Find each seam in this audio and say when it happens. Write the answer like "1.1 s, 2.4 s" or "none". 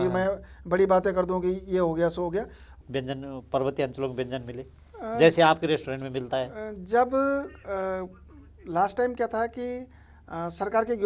2.8 s